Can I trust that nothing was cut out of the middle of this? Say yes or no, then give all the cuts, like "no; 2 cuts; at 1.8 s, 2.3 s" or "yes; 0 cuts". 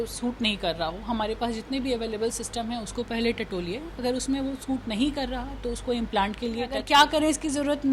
no; 1 cut; at 6.8 s